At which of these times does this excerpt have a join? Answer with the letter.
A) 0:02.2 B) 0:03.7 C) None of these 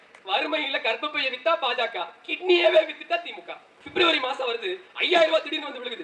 B